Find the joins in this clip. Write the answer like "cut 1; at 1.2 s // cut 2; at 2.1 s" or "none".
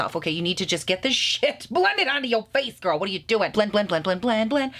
cut 1; at 3.5 s